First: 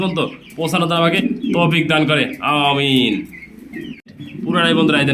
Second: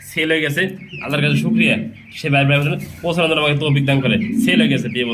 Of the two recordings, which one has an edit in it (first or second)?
first